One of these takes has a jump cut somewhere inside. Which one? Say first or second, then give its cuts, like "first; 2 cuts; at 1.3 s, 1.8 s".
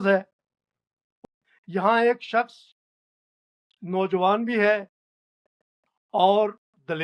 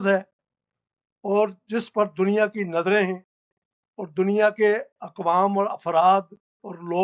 first; 1 cut; at 1.1 s